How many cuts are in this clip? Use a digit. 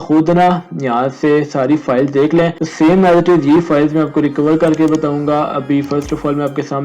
1